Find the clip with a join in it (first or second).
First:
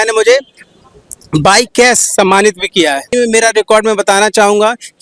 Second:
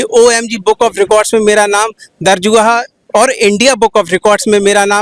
first